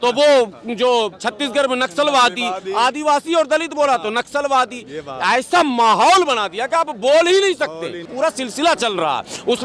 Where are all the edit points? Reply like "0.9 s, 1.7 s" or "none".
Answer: 8.0 s